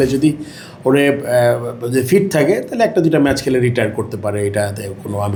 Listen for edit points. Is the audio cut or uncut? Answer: uncut